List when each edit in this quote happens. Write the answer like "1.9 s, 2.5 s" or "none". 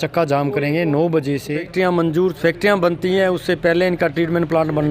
1.7 s